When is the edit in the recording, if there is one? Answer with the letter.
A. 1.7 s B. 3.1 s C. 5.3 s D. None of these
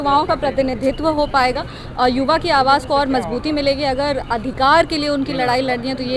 D